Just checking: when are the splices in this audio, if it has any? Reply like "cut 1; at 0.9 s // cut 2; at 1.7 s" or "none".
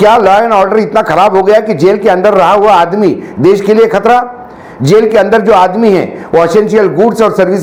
none